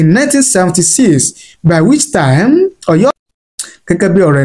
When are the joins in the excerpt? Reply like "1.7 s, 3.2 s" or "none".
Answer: 3.2 s